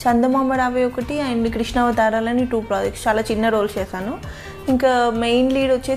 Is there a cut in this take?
no; 0 cuts

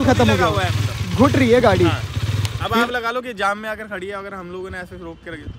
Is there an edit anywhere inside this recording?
no; 0 cuts

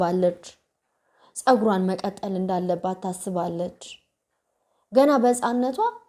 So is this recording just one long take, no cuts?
yes; 0 cuts

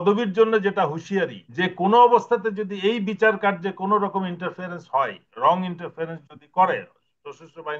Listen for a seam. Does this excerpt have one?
yes; 1 cut; at 1.4 s

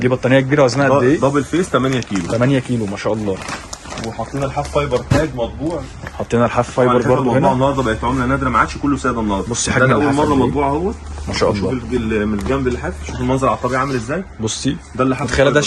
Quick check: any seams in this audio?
no; 0 cuts

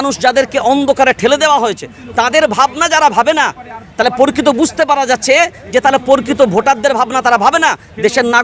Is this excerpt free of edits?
yes; 0 cuts

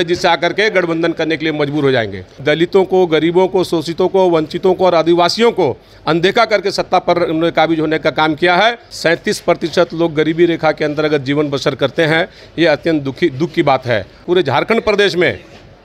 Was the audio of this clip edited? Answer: yes; 3 cuts; at 2.4 s, 8.9 s, 14.2 s

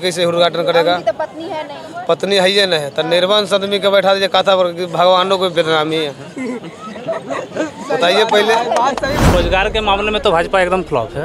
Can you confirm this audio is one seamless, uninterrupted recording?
no; 1 cut; at 9.3 s

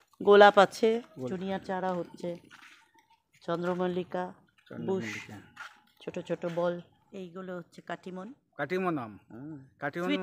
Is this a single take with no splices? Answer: no; 2 cuts; at 1.3 s, 7.1 s

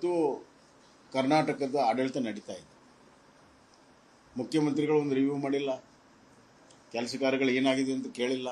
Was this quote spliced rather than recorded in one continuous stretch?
no; 0 cuts

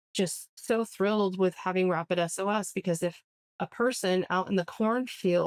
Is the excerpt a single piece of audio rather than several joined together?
yes; 0 cuts

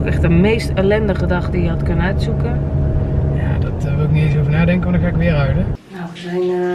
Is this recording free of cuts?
no; 1 cut; at 5.8 s

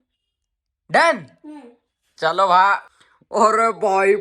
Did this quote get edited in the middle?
yes; 1 cut; at 2.9 s

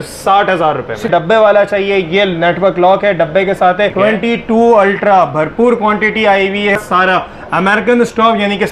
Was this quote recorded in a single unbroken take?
no; 3 cuts; at 1.1 s, 3.9 s, 6.8 s

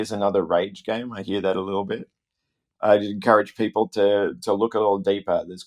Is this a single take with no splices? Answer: yes; 0 cuts

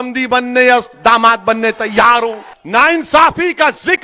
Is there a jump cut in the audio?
yes; 1 cut; at 2.5 s

